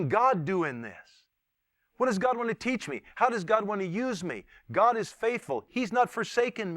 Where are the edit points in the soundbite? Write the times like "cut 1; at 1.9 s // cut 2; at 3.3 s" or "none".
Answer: cut 1; at 5.7 s